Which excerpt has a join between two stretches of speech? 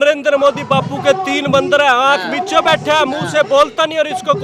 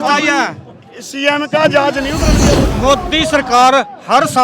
second; 1 cut; at 2.4 s

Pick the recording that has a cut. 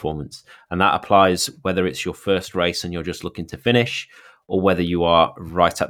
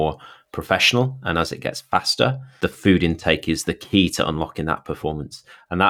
second; 1 cut; at 2.5 s

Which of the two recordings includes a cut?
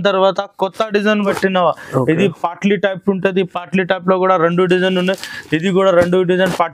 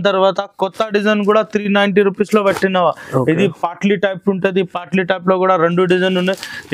first; 1 cut; at 1.3 s

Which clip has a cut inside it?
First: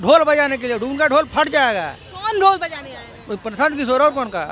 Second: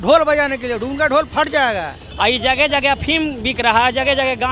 second; 1 cut; at 2.0 s

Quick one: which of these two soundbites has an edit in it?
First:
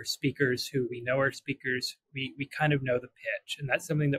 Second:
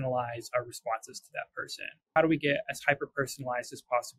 second; 1 cut; at 2.1 s

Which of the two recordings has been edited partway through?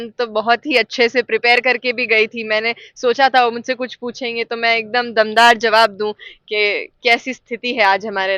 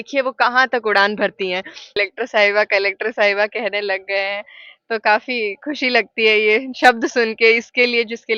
second; 1 cut; at 2.0 s

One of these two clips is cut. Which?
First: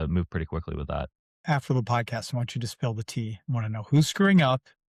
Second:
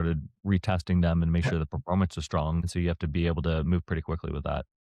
second; 1 cut; at 2.6 s

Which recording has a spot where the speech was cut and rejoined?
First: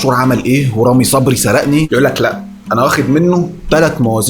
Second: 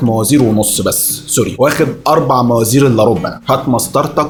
first; 1 cut; at 1.9 s

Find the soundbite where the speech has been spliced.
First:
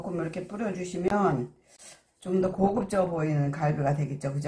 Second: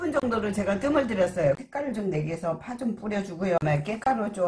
second; 2 cuts; at 1.6 s, 3.6 s

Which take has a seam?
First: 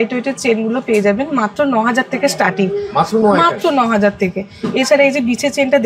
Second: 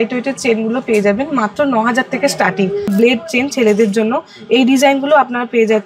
second; 1 cut; at 2.9 s

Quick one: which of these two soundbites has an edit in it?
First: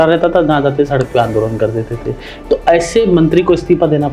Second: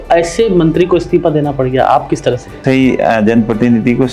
second; 1 cut; at 2.6 s

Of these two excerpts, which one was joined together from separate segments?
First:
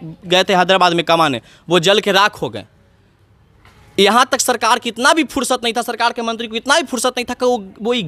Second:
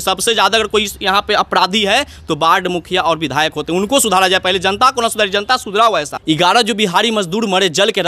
second; 1 cut; at 6.1 s

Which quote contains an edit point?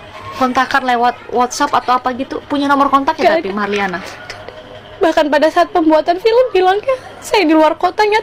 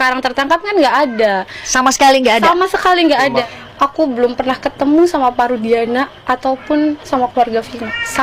second; 1 cut; at 3.4 s

